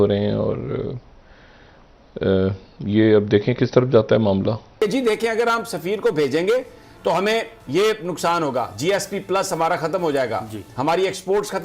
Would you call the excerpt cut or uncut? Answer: cut